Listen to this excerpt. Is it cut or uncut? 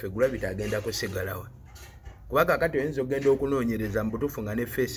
uncut